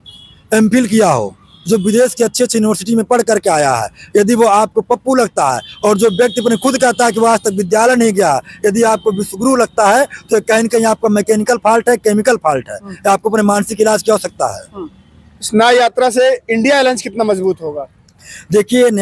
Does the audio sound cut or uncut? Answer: uncut